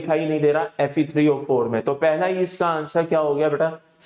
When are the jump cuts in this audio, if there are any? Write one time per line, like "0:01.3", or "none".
none